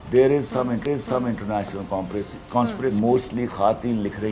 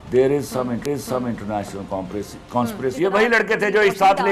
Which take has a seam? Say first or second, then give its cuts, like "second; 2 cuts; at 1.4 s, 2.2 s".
second; 1 cut; at 2.9 s